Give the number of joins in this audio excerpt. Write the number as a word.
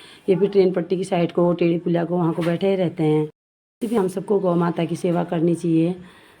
one